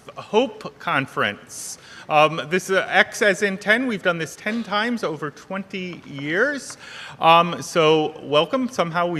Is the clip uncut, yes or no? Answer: yes